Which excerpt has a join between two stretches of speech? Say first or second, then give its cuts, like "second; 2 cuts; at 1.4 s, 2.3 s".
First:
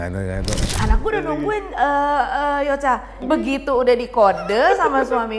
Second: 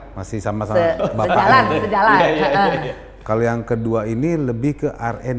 first; 2 cuts; at 0.8 s, 3.2 s